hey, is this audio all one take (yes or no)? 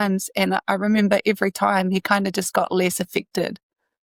yes